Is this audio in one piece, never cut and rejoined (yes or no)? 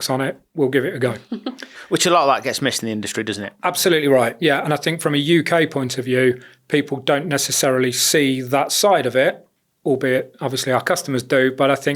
yes